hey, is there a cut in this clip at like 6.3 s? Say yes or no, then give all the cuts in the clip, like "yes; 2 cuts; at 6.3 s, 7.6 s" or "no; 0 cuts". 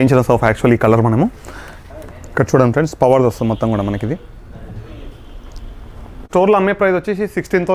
yes; 1 cut; at 6.3 s